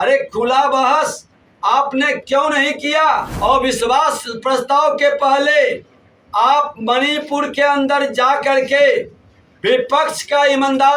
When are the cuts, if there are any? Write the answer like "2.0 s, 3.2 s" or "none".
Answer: 3.3 s